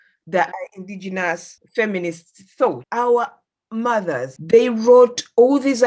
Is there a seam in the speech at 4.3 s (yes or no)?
yes